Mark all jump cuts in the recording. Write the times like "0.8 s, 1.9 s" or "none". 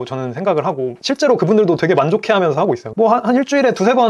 2.6 s